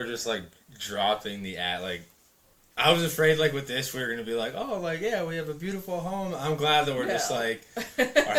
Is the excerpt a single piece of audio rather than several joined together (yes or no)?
yes